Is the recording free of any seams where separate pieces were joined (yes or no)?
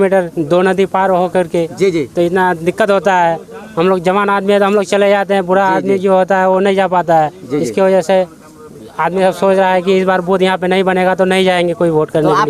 yes